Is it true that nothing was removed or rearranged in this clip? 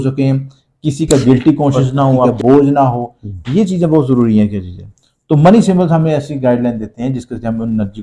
no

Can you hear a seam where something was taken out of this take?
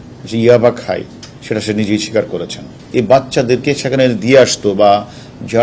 yes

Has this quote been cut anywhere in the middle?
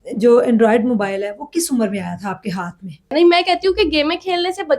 yes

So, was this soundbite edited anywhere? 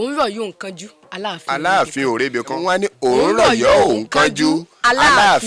yes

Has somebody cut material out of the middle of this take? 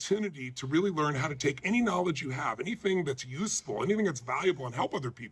yes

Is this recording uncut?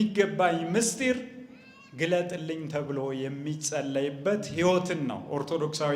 yes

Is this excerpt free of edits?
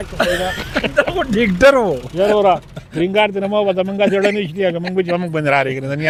yes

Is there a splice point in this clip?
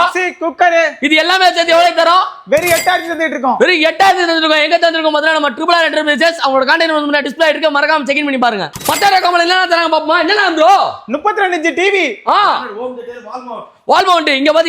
yes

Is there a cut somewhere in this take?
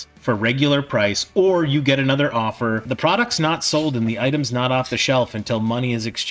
yes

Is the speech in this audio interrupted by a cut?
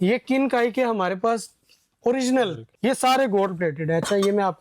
yes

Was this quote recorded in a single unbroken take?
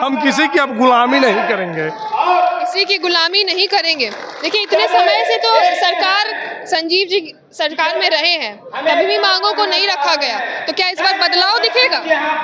yes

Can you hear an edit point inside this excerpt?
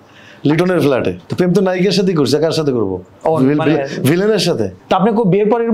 yes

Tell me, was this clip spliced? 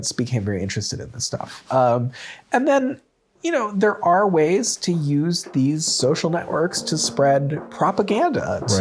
no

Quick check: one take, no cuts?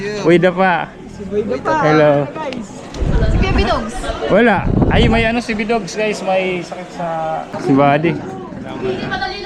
no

